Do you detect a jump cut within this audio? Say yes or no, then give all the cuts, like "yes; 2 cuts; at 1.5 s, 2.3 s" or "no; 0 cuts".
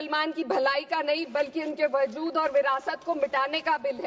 no; 0 cuts